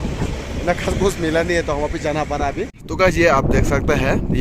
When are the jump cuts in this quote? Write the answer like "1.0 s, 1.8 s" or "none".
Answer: 2.8 s